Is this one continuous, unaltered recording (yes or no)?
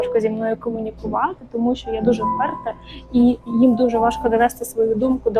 yes